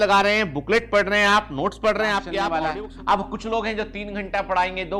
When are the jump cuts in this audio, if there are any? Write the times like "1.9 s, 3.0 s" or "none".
2.2 s

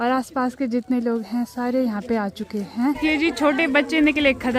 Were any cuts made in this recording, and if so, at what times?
none

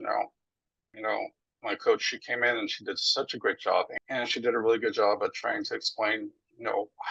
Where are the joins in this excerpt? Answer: 0.9 s, 3.9 s

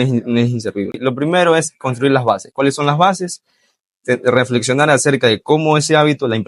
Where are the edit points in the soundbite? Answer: none

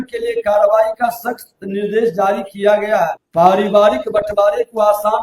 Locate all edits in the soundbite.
3.2 s

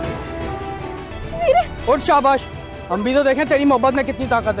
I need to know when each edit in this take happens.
1.0 s

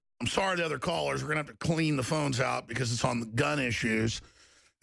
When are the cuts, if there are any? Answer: 3.3 s

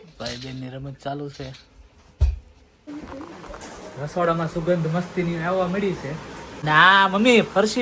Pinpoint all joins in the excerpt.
2.9 s, 6.4 s

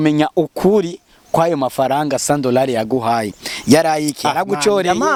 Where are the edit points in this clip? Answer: none

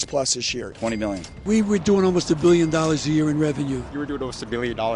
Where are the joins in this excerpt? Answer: 0.8 s, 3.9 s

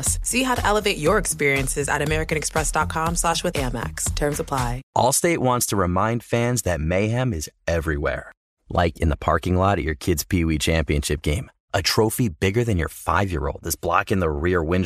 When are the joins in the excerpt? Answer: 4.8 s

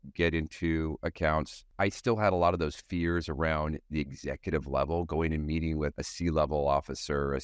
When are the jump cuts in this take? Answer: 1.6 s, 5.9 s

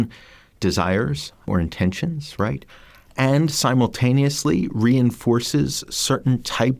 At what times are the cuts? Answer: 1.5 s

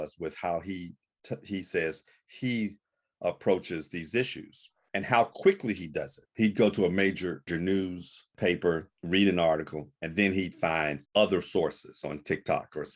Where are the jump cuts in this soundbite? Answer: 6.2 s, 7.5 s

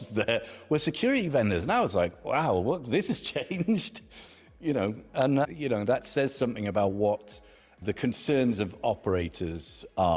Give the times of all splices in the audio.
none

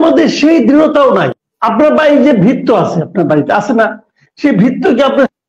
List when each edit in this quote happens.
1.4 s

